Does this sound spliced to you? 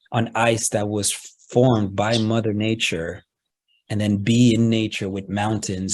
no; 0 cuts

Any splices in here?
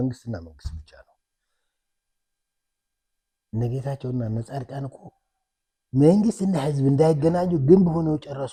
no; 0 cuts

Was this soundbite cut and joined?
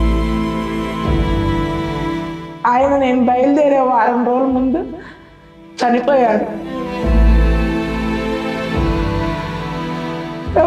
no; 0 cuts

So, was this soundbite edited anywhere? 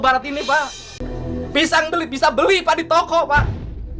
yes; 1 cut; at 1.1 s

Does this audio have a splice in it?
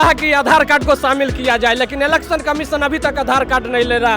no; 0 cuts

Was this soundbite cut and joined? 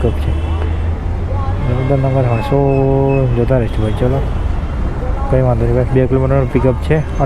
no; 0 cuts

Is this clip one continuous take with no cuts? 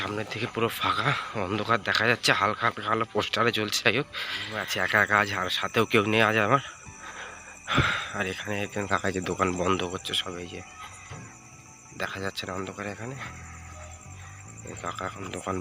no; 1 cut; at 4.5 s

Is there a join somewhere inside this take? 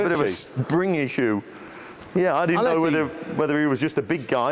no; 0 cuts

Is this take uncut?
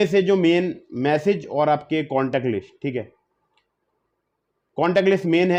yes; 0 cuts

